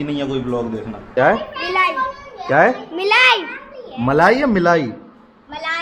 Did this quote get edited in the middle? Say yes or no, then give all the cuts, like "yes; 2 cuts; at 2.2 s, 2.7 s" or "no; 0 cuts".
yes; 1 cut; at 1.1 s